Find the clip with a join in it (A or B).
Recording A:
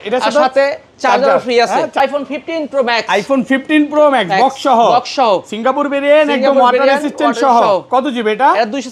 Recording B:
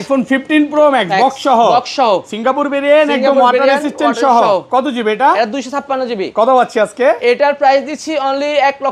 A